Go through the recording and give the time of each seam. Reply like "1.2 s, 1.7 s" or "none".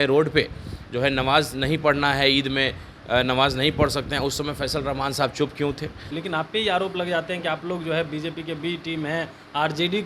6.1 s